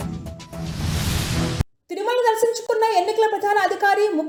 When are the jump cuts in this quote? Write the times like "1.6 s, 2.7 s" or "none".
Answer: none